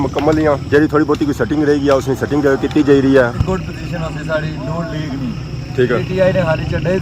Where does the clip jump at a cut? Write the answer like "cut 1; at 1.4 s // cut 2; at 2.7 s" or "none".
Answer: cut 1; at 3.4 s